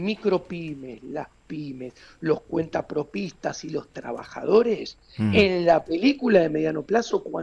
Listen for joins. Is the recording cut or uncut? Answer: uncut